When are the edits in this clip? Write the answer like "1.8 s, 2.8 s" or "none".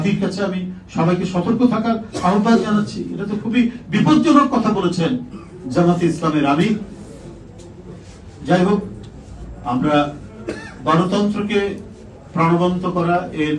none

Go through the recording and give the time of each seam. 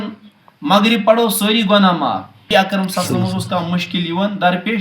2.5 s

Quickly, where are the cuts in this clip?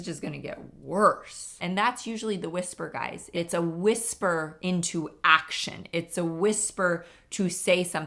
1.6 s, 3.3 s

